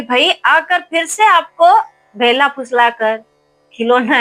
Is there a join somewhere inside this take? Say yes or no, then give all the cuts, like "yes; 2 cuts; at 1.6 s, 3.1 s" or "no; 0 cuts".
no; 0 cuts